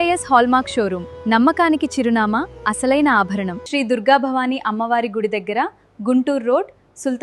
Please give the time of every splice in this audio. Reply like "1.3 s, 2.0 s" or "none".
3.6 s